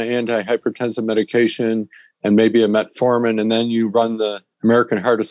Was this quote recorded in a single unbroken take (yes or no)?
yes